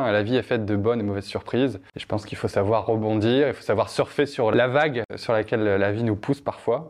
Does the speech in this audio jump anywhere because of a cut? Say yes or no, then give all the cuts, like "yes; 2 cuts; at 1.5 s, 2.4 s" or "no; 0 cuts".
yes; 2 cuts; at 1.9 s, 4.5 s